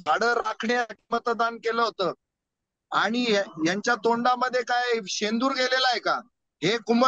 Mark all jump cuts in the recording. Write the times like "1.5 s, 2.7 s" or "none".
none